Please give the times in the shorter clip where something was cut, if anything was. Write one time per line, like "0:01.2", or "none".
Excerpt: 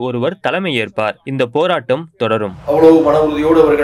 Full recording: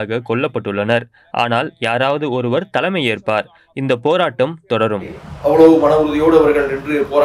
0:01.2
0:02.5